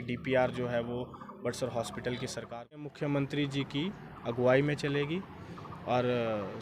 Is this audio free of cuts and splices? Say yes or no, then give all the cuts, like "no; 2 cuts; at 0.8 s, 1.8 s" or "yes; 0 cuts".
no; 1 cut; at 2.9 s